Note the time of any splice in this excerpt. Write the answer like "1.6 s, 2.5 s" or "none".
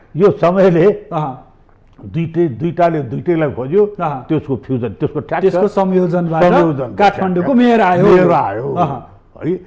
none